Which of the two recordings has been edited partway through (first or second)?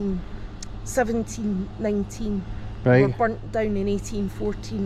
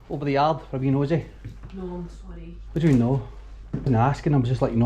second